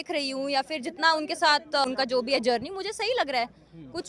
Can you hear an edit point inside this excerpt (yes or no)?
yes